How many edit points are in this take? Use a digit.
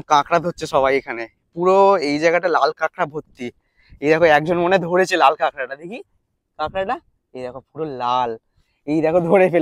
0